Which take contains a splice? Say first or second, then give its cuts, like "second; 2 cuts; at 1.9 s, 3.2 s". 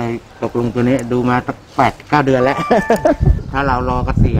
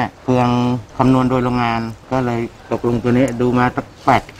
first; 1 cut; at 3.4 s